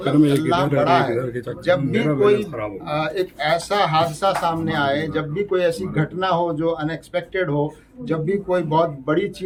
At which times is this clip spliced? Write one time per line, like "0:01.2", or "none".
none